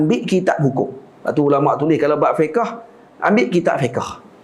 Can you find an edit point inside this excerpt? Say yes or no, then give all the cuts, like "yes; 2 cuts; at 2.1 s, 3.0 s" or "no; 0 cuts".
no; 0 cuts